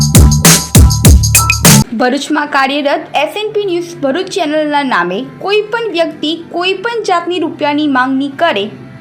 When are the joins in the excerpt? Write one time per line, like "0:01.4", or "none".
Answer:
0:01.9